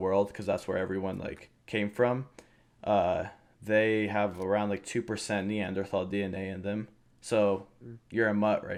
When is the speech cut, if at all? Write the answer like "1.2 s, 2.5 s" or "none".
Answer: none